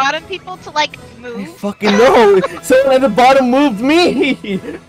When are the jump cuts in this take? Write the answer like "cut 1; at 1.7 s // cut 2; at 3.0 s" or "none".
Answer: none